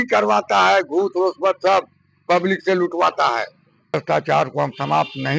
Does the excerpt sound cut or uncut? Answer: cut